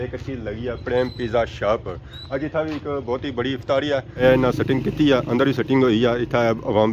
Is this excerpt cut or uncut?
cut